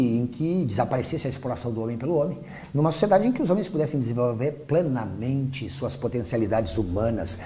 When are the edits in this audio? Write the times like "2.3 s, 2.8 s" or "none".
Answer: none